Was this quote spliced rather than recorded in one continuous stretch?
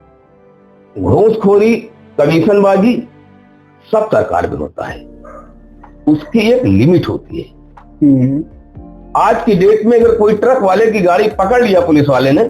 yes; 1 cut; at 0.9 s

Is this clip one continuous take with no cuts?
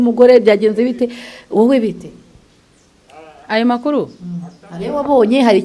yes; 0 cuts

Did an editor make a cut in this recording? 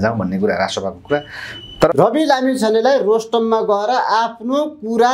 yes; 1 cut; at 1.9 s

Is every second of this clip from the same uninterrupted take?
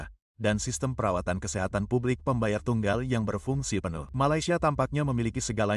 no; 1 cut; at 4.0 s

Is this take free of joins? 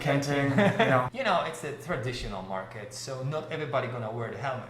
no; 1 cut; at 1.1 s

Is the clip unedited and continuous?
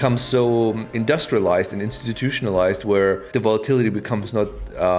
no; 2 cuts; at 0.9 s, 3.2 s

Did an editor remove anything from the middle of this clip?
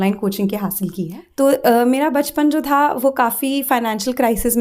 yes; 1 cut; at 1.2 s

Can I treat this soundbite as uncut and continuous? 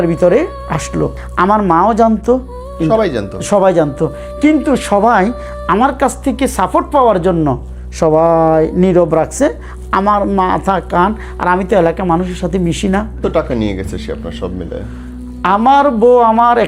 no; 2 cuts; at 1.2 s, 13.2 s

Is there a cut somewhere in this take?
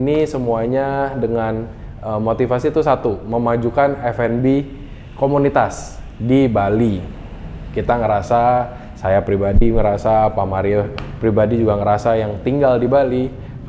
no; 0 cuts

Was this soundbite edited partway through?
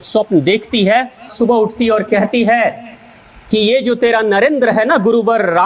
no; 0 cuts

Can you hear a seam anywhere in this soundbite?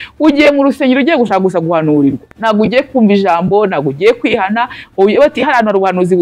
no; 0 cuts

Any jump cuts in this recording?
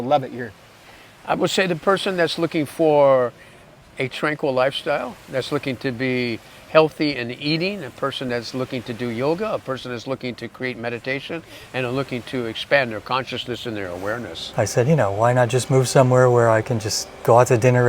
yes; 1 cut; at 14.4 s

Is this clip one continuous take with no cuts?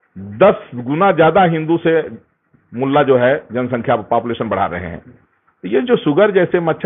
yes; 0 cuts

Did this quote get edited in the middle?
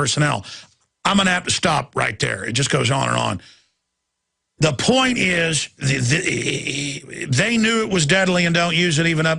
no; 0 cuts

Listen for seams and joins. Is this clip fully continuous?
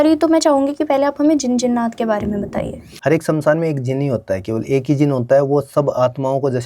no; 1 cut; at 2.8 s

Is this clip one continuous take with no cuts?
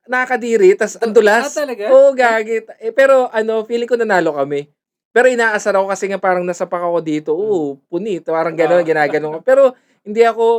yes; 0 cuts

